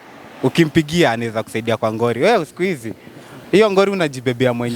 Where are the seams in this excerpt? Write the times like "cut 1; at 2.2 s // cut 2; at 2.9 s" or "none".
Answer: cut 1; at 2.2 s